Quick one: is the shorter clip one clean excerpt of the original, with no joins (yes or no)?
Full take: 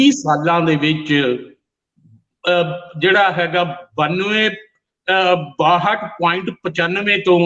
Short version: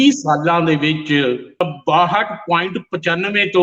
no